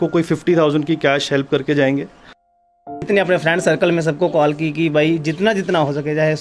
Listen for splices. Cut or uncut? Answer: cut